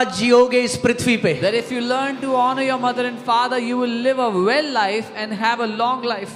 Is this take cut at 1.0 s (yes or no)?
no